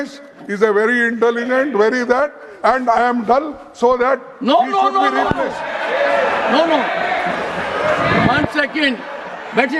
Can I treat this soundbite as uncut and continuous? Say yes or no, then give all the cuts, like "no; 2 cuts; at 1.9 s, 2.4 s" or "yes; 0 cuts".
yes; 0 cuts